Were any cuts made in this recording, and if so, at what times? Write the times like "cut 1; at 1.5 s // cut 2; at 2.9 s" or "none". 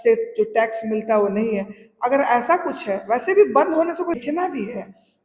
cut 1; at 4.2 s